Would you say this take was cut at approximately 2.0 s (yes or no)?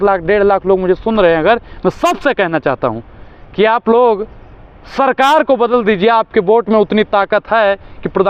no